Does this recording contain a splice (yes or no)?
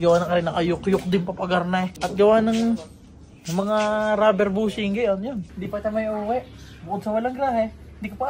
yes